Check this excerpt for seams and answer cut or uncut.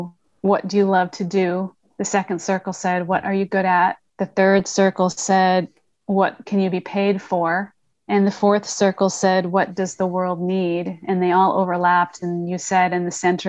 uncut